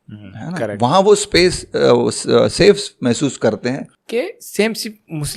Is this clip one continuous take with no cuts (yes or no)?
no